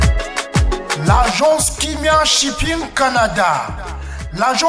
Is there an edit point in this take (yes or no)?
yes